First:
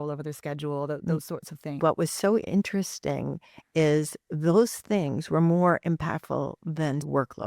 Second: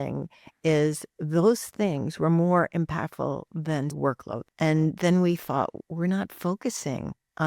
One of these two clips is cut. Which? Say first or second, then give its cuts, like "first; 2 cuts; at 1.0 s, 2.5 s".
first; 1 cut; at 1.8 s